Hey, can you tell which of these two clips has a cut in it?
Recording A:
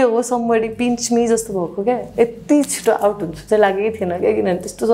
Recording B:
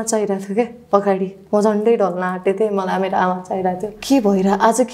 B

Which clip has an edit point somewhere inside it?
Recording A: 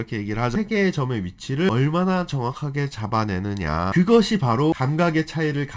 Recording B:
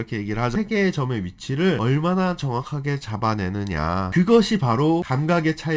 A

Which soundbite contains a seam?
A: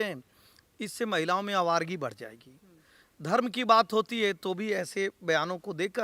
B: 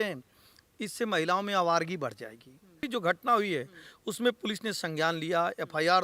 B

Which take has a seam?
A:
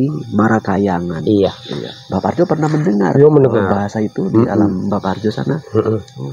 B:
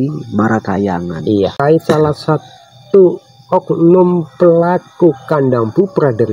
B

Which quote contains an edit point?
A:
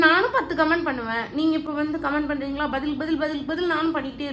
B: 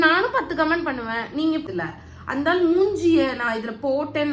B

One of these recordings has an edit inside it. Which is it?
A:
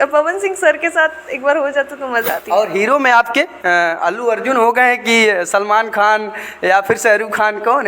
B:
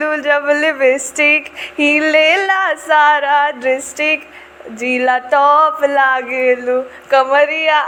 A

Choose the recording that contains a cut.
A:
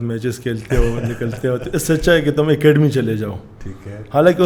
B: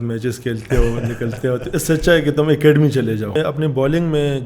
B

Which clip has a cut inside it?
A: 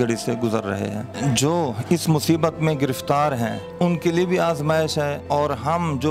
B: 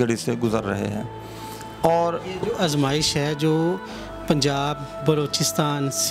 A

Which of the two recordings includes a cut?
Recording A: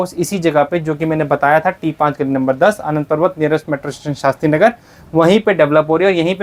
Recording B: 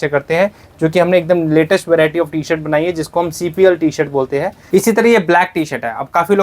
B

